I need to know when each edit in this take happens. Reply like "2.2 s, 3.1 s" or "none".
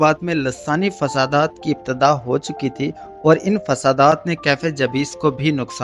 none